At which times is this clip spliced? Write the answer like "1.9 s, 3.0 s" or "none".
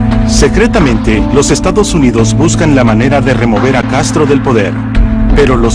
3.9 s